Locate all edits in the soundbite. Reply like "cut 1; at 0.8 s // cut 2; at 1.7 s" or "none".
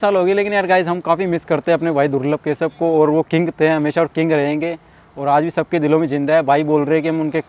none

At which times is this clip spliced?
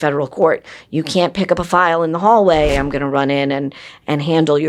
cut 1; at 2.7 s

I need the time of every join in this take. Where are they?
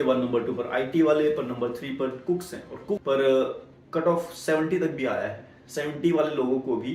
cut 1; at 3.0 s

